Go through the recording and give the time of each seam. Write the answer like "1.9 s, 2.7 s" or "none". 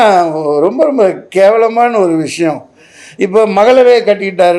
none

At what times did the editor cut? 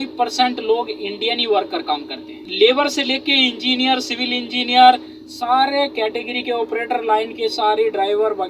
2.4 s

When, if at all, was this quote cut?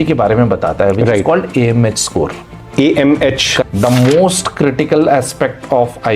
3.6 s

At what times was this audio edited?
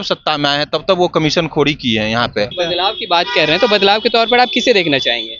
2.5 s

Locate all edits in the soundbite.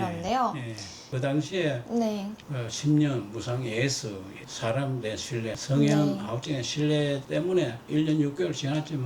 1.1 s

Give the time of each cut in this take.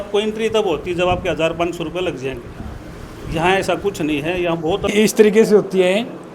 4.9 s

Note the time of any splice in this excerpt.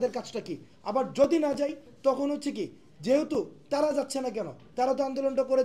none

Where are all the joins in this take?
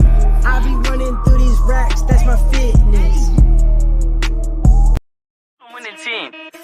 5.0 s

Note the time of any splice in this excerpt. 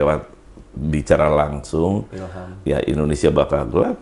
none

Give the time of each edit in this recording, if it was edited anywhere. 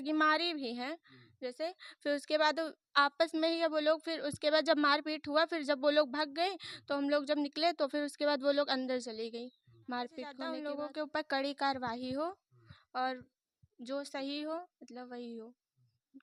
10.5 s

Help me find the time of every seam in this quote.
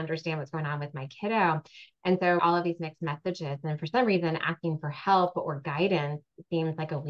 none

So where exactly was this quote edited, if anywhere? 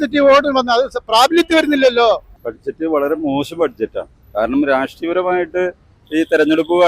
none

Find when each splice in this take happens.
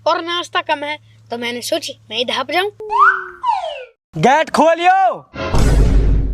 3.9 s

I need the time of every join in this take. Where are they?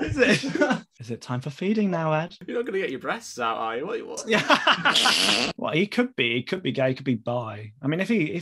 0.9 s, 2.4 s, 5.5 s

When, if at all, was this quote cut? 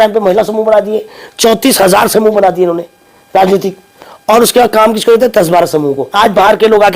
6.0 s

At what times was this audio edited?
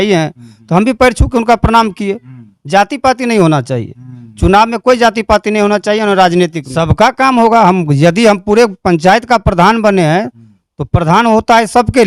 6.7 s

